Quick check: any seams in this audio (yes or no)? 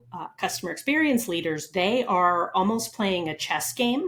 no